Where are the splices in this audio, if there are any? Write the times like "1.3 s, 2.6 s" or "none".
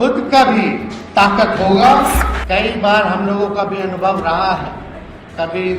2.3 s